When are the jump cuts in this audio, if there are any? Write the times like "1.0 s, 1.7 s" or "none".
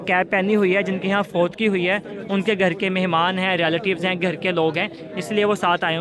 none

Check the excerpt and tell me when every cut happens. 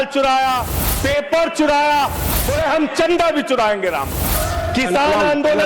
2.3 s, 4.4 s

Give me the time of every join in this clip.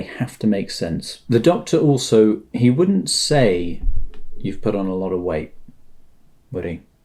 none

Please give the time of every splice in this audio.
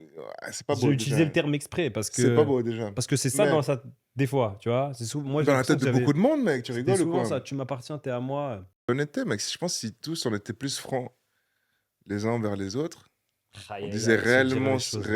8.8 s

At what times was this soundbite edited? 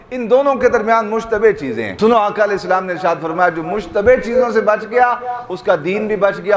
1.8 s

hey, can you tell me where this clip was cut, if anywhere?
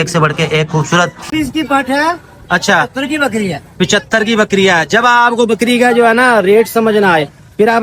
1.3 s

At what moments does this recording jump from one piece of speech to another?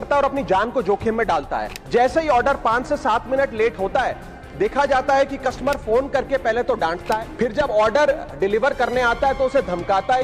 1.7 s, 7.3 s

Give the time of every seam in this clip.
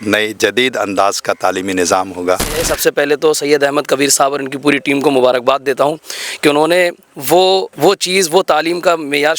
2.7 s, 7.7 s

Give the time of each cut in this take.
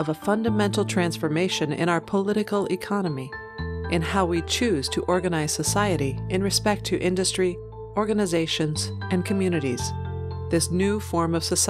none

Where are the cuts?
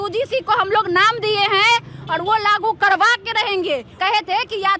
3.9 s

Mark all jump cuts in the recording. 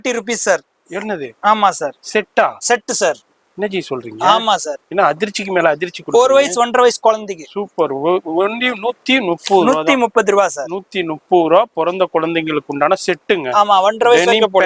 none

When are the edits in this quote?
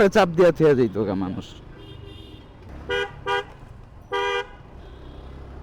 2.7 s

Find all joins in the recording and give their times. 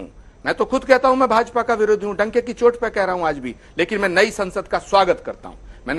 none

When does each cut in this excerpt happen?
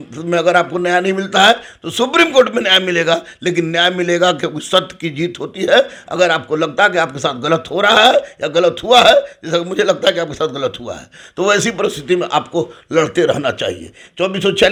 none

